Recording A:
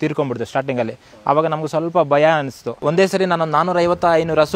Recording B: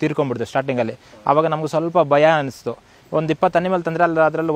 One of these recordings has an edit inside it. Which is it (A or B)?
A